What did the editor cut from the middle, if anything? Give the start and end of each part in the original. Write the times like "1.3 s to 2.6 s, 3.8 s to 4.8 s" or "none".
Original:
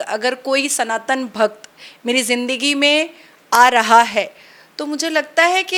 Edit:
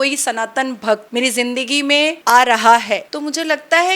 1.6 s to 2.0 s, 3.1 s to 3.4 s, 4.4 s to 4.8 s